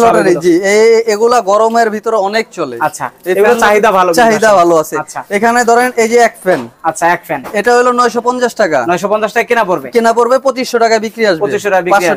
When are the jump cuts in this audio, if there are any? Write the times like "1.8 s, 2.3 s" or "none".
none

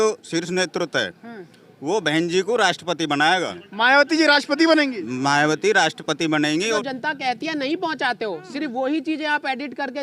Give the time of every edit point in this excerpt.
3.6 s, 6.8 s

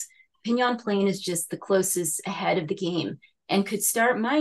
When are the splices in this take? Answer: none

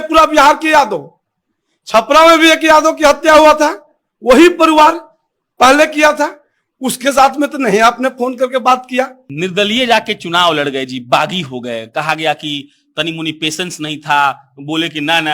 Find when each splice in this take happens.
9.2 s

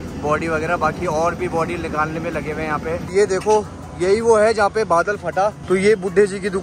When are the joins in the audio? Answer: 3.1 s, 5.6 s

